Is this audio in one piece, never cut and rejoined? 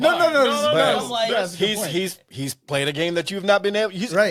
yes; 0 cuts

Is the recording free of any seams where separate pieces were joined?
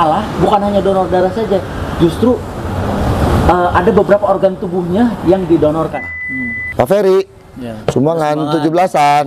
no; 1 cut; at 6.1 s

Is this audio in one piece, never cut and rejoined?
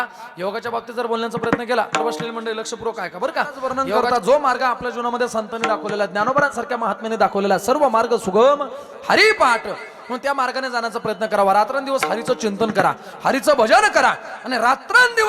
no; 1 cut; at 4.0 s

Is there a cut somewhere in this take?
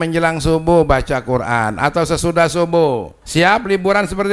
yes; 1 cut; at 3.1 s

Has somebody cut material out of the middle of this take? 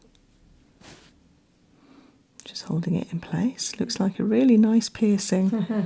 no; 0 cuts

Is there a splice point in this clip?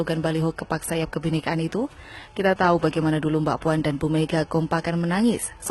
no; 0 cuts

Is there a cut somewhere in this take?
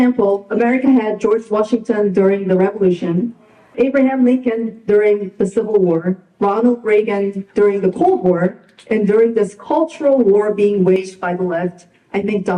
yes; 1 cut; at 3.7 s

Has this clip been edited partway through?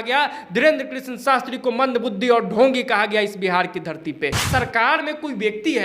yes; 1 cut; at 4.4 s

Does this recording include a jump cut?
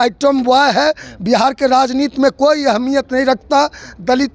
no; 0 cuts

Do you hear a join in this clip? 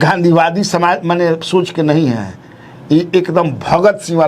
no; 0 cuts

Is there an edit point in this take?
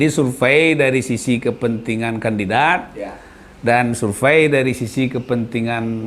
no; 0 cuts

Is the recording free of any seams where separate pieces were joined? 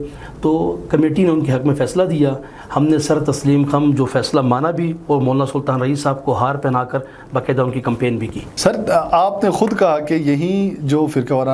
yes; 0 cuts

